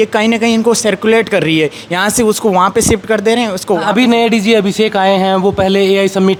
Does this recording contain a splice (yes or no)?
no